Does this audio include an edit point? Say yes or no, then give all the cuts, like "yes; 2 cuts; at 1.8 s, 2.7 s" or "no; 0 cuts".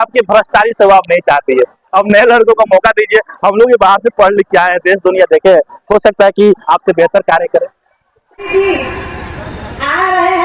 no; 0 cuts